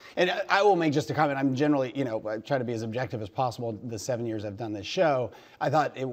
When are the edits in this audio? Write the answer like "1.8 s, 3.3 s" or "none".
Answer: 4.7 s